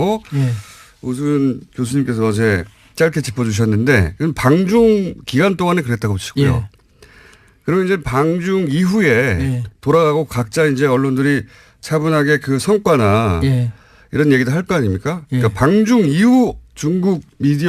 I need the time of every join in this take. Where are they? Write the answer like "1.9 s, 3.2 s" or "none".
12.6 s